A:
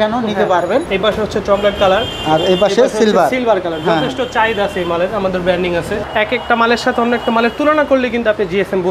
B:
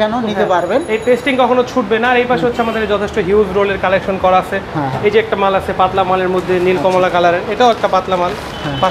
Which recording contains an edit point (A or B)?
A